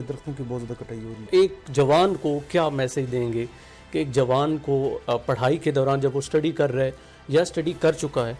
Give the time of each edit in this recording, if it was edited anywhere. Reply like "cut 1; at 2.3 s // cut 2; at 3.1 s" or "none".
cut 1; at 1.3 s